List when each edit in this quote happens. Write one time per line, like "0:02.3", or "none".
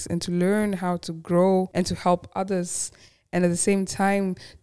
0:01.7